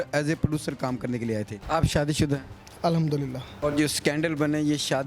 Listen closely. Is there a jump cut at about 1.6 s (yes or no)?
yes